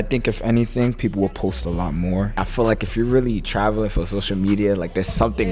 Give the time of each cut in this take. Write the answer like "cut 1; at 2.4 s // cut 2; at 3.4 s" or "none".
cut 1; at 2.4 s